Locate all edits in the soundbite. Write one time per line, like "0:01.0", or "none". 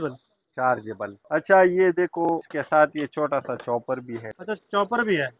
0:01.2
0:02.5
0:04.3